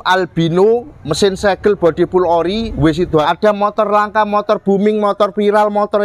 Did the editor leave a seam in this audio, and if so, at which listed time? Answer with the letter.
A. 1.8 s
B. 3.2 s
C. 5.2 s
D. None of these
B